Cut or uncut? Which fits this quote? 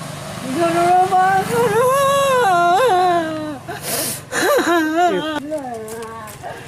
cut